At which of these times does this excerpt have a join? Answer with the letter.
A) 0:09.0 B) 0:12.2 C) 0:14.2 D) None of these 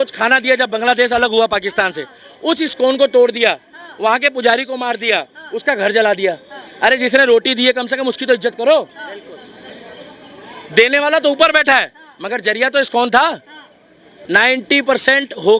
C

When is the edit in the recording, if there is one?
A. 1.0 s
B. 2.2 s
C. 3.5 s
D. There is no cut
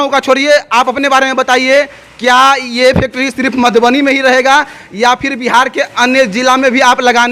D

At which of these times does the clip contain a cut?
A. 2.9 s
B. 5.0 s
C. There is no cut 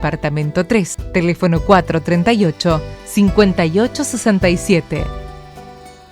B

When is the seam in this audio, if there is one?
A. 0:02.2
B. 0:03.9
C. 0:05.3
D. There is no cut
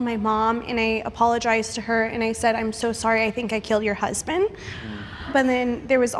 C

